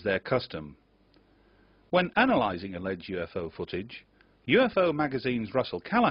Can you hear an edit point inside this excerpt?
yes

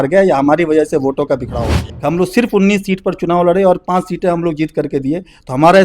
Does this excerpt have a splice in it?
yes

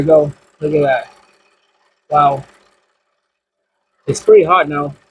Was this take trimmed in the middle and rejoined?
no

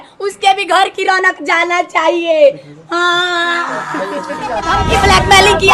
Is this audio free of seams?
no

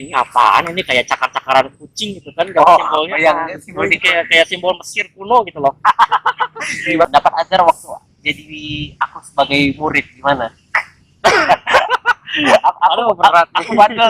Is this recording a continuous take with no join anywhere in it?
no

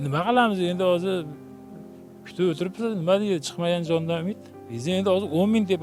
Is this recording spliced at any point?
no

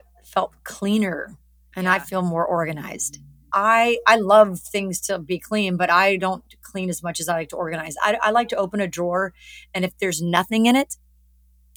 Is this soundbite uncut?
yes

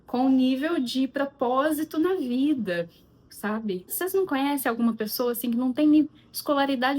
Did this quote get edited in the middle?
yes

